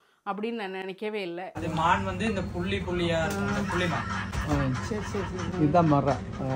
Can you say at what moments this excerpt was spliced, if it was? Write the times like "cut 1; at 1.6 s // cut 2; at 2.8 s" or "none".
cut 1; at 1.6 s